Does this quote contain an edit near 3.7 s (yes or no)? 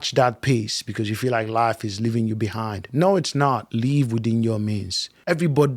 yes